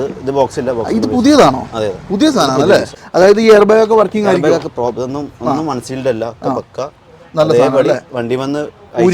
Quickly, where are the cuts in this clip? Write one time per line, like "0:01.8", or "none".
0:03.0